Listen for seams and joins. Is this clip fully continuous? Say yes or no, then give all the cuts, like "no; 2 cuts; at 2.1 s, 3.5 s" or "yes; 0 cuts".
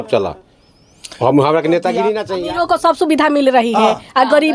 no; 1 cut; at 2.3 s